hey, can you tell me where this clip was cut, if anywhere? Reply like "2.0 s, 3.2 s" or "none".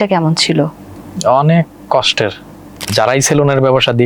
2.9 s